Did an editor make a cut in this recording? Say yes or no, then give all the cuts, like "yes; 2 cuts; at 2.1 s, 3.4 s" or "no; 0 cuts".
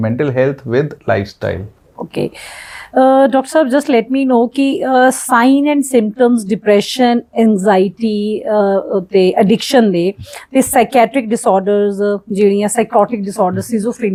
no; 0 cuts